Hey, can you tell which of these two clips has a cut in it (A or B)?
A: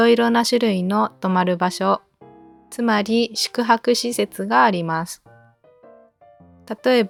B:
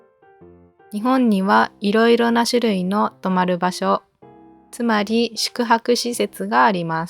B